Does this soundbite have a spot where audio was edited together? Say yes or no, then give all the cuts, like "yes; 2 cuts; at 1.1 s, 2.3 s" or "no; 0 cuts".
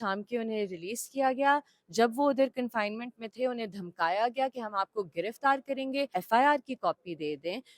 yes; 1 cut; at 6.1 s